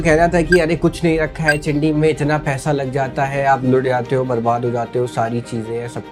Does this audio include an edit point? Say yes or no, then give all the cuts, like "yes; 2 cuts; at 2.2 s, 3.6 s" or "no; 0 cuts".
no; 0 cuts